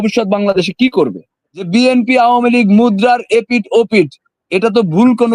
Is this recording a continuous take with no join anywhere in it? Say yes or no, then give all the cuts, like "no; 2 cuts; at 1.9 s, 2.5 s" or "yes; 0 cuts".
no; 1 cut; at 1.5 s